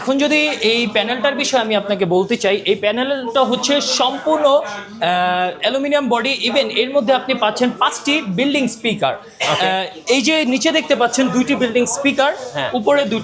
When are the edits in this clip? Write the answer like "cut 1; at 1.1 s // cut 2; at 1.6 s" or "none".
none